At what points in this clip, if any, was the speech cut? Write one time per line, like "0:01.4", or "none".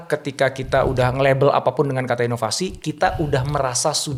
none